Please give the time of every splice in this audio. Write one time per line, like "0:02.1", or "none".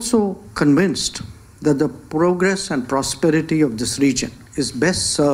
0:04.4

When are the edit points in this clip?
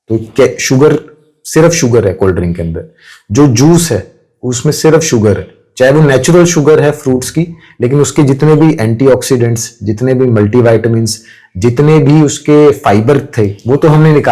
none

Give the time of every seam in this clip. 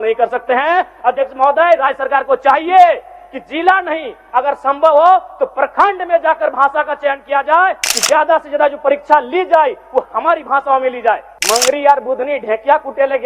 0:07.8
0:11.3

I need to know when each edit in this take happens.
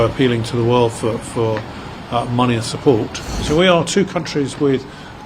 0:03.3

